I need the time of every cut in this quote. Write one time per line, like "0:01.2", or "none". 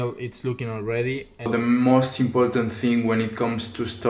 0:01.5